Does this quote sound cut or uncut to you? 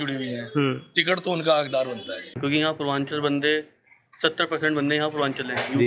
cut